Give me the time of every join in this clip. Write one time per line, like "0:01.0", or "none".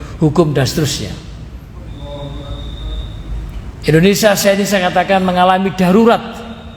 none